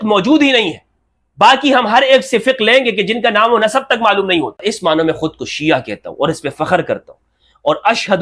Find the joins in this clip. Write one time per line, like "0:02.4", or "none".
0:04.6